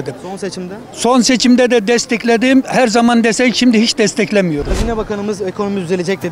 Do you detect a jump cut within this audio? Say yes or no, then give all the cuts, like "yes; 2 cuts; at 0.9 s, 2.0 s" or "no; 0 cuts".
yes; 1 cut; at 4.7 s